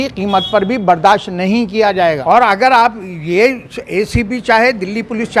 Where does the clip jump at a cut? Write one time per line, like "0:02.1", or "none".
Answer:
0:02.2